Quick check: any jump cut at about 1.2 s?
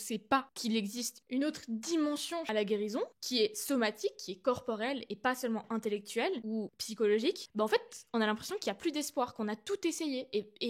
yes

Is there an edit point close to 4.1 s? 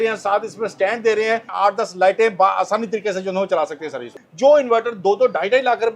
yes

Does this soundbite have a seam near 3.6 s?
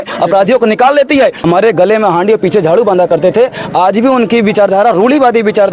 no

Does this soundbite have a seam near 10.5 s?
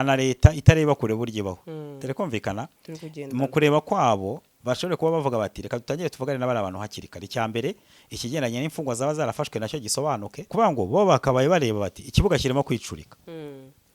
yes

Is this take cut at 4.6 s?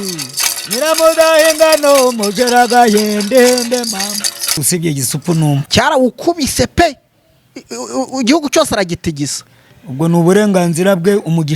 yes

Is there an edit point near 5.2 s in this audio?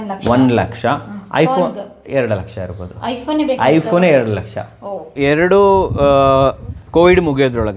yes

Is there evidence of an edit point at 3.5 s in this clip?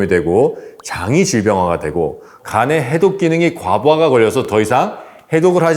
no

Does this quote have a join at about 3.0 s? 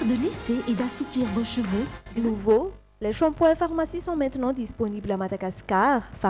no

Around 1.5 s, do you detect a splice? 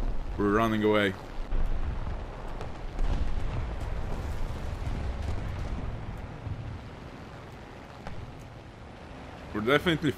yes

